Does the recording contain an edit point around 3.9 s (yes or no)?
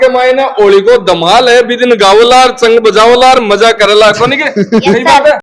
no